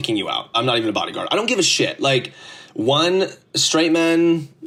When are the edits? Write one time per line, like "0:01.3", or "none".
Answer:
none